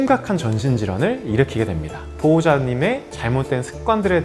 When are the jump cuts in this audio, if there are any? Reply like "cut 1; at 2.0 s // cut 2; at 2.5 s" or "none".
cut 1; at 2.0 s